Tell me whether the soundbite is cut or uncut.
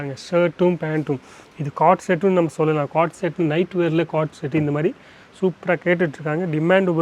uncut